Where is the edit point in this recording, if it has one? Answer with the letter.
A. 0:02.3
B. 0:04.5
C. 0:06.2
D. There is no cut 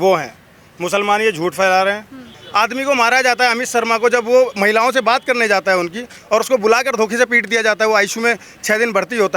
A